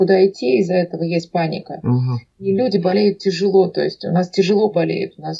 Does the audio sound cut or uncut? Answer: uncut